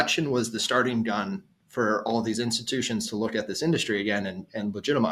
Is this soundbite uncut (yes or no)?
yes